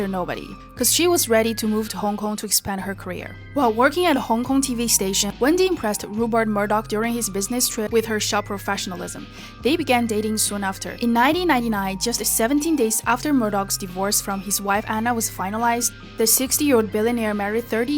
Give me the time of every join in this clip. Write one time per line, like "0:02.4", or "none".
0:08.3
0:11.2

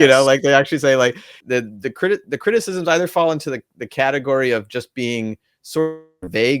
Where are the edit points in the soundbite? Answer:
0:01.3

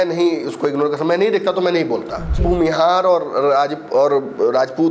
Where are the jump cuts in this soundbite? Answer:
0:02.4

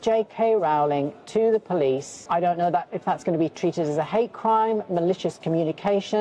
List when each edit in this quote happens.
0:02.1

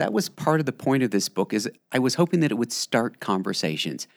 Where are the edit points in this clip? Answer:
none

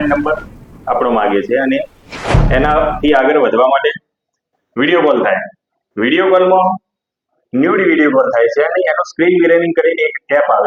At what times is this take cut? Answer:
none

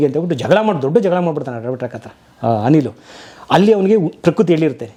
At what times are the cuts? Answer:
none

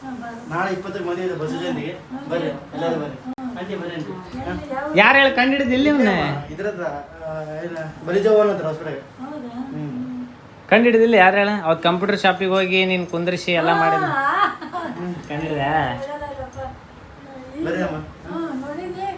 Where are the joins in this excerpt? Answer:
none

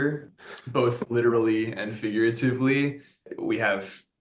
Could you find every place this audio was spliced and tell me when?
0:03.3

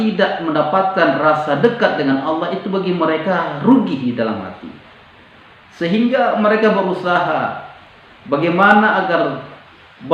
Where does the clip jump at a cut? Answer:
none

